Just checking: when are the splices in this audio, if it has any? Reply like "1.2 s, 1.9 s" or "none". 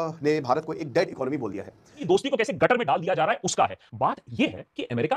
2.0 s